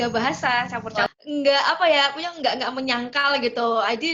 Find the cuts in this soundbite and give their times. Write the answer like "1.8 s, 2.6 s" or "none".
1.1 s